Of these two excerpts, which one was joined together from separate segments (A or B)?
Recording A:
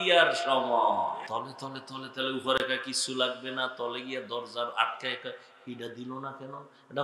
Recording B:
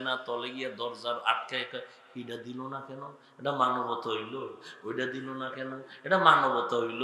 A